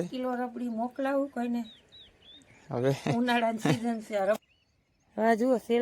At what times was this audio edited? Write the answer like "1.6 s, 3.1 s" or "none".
4.4 s